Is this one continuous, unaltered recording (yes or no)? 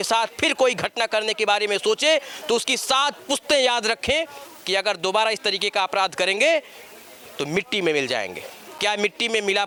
yes